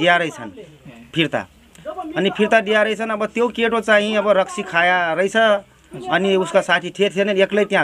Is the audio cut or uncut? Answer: uncut